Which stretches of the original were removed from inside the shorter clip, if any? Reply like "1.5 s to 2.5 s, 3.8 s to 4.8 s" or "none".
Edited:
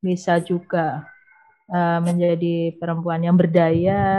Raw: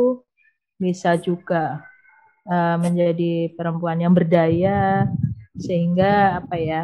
none